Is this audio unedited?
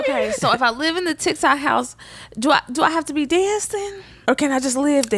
yes; 0 cuts

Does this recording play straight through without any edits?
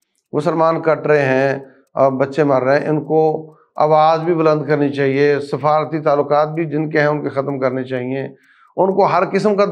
yes; 0 cuts

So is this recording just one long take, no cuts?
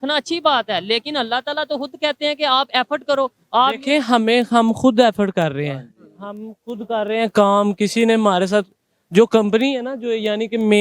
yes; 0 cuts

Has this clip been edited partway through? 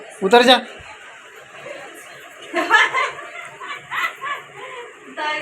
no; 0 cuts

